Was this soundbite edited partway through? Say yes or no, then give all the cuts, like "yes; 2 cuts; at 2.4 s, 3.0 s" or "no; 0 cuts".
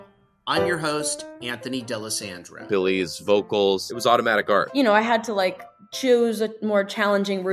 no; 0 cuts